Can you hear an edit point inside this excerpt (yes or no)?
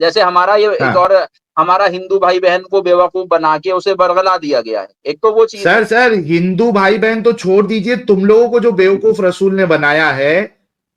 no